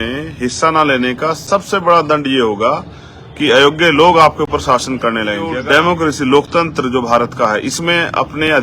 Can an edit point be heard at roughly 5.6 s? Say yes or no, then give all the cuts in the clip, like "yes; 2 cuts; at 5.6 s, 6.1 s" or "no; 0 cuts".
yes; 1 cut; at 5.6 s